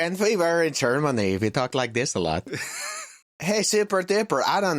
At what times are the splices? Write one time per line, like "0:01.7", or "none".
0:03.5